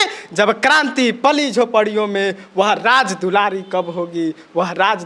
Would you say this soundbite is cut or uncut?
uncut